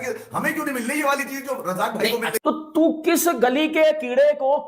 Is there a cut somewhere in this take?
yes; 1 cut; at 2.4 s

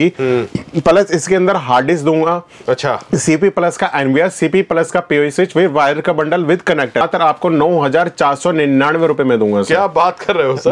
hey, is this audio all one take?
no; 1 cut; at 7.0 s

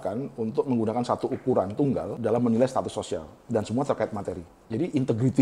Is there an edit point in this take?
yes; 3 cuts; at 2.2 s, 3.3 s, 4.5 s

